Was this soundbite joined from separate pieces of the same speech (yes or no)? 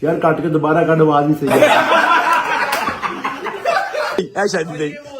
yes